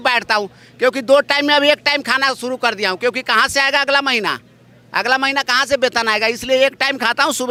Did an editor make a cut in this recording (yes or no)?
no